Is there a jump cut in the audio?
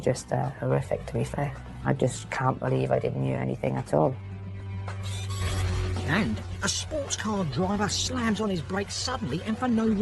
yes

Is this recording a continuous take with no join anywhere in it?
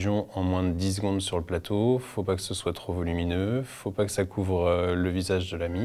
yes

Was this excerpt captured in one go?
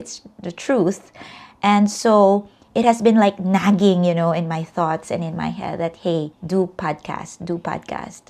yes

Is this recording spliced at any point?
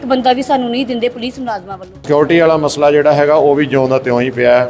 yes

